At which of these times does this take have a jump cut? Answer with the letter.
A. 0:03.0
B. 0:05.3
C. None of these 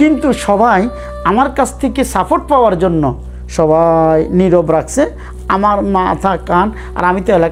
C